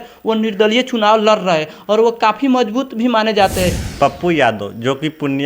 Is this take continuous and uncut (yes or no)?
no